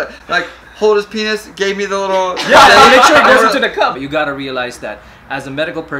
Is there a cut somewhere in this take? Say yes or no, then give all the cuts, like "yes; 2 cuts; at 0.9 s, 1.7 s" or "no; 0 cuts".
yes; 1 cut; at 3.9 s